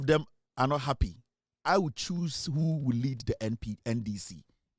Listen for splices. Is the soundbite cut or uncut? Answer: uncut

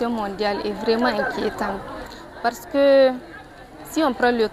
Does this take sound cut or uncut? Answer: uncut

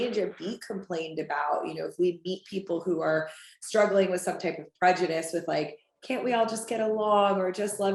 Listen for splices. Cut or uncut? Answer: uncut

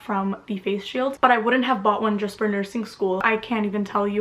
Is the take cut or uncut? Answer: cut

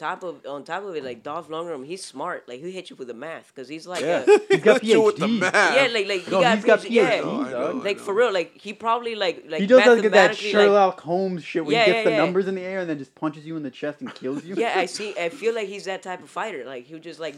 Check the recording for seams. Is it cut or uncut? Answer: uncut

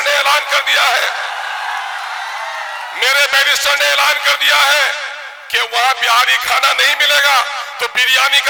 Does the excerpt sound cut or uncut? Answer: uncut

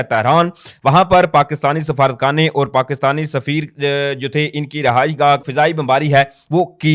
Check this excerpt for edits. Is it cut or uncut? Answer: cut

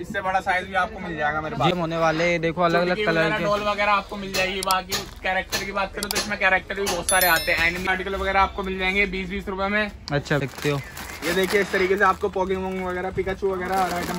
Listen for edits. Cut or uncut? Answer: cut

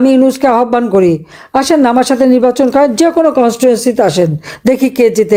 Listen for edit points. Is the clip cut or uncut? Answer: uncut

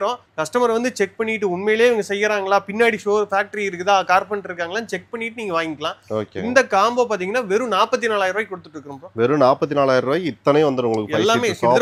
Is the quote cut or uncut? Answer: uncut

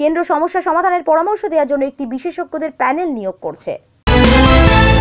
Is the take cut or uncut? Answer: cut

